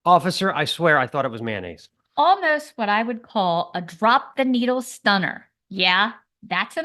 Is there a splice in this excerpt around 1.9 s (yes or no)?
yes